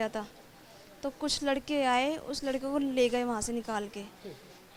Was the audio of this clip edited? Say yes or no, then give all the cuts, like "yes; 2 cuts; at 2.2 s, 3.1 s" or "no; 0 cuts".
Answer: no; 0 cuts